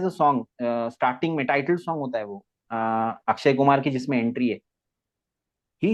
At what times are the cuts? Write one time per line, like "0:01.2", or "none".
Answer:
none